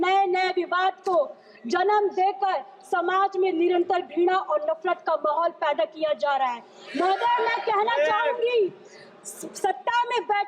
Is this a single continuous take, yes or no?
yes